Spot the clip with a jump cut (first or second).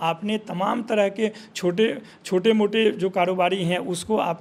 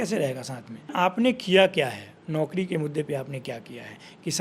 second